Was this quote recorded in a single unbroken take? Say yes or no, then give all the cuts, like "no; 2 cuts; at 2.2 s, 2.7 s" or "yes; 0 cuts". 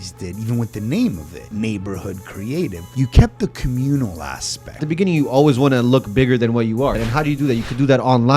no; 4 cuts; at 1.4 s, 2.8 s, 4.8 s, 7.0 s